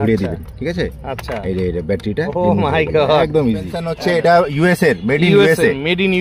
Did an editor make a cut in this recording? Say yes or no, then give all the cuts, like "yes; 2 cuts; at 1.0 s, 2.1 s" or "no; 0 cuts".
yes; 1 cut; at 3.8 s